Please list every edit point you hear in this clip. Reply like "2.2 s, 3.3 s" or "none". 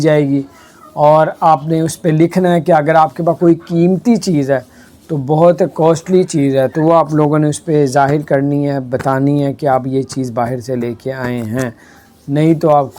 none